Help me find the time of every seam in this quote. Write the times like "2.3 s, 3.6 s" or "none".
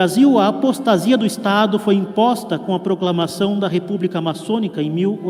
none